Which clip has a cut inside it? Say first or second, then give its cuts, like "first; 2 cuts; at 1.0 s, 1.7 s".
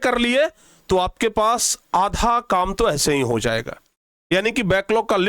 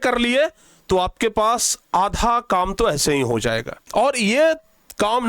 second; 1 cut; at 3.8 s